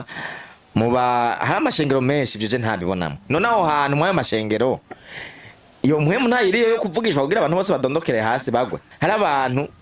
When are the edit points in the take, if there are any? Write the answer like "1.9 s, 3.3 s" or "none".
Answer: 8.9 s